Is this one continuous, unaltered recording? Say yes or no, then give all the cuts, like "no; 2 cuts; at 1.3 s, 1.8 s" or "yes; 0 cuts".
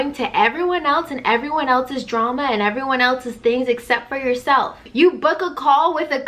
no; 1 cut; at 4.8 s